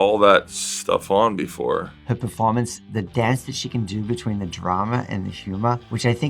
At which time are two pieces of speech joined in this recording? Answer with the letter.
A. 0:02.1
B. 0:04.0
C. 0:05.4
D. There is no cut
A